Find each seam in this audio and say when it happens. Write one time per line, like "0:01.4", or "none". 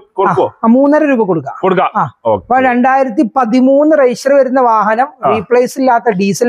none